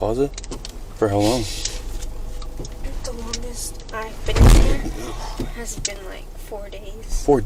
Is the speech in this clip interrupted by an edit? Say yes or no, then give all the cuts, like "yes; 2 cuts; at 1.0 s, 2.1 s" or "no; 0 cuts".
no; 0 cuts